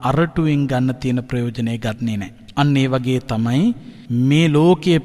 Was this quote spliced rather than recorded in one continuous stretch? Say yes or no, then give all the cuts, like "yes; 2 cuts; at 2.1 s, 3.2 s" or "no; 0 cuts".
yes; 2 cuts; at 2.4 s, 3.9 s